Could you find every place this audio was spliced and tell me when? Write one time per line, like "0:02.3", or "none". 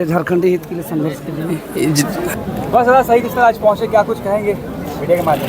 0:02.3